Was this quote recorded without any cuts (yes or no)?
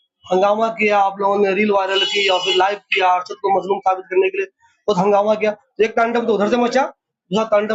yes